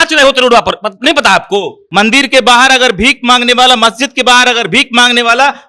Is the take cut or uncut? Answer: cut